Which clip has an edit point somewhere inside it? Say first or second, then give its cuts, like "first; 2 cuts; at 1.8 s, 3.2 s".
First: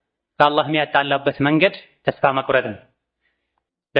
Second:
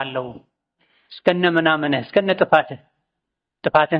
first; 1 cut; at 1.9 s